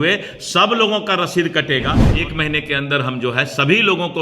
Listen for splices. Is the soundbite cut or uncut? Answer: cut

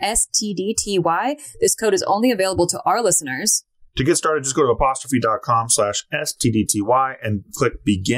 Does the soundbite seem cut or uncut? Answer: uncut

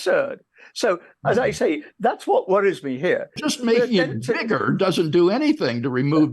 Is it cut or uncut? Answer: cut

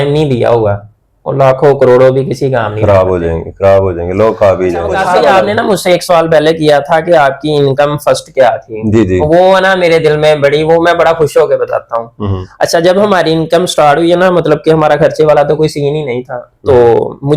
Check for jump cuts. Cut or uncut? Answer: cut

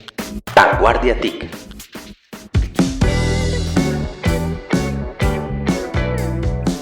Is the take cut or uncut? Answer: cut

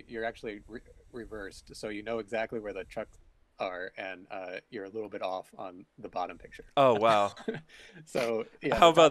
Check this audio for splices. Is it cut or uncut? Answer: uncut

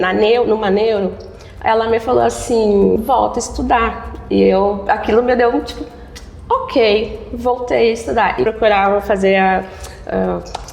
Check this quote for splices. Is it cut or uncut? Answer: cut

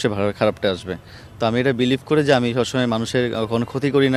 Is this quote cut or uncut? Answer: uncut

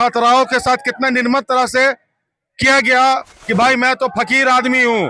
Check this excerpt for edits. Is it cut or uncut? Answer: cut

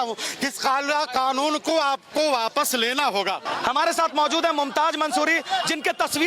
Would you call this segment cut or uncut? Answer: cut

